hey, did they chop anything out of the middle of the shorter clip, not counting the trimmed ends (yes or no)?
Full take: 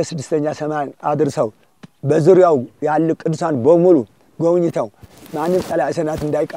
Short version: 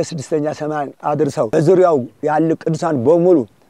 yes